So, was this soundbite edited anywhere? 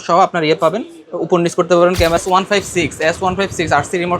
yes; 1 cut; at 2.2 s

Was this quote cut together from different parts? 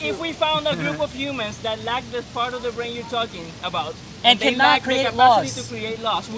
no; 0 cuts

